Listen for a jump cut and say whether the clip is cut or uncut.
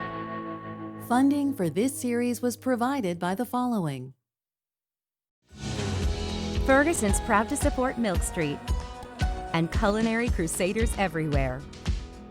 cut